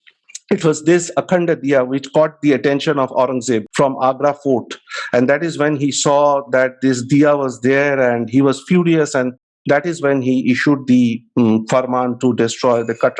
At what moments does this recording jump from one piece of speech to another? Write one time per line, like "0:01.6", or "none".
none